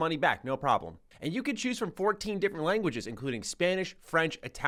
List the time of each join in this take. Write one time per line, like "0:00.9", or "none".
none